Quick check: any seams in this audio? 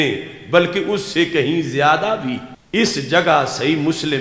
yes; 1 cut; at 2.5 s

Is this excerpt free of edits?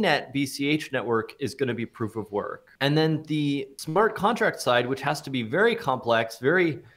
no; 2 cuts; at 2.6 s, 3.7 s

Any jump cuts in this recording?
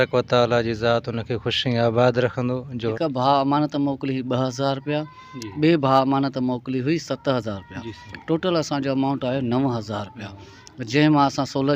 yes; 1 cut; at 2.9 s

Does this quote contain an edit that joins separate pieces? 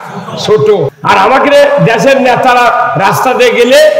yes; 1 cut; at 1.0 s

